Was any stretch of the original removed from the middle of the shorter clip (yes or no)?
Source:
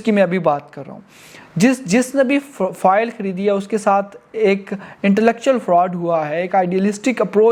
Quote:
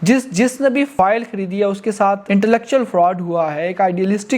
yes